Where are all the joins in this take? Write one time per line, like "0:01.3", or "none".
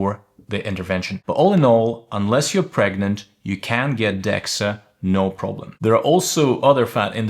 0:01.1
0:05.7